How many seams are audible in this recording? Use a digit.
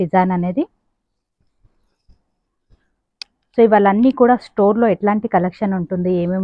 0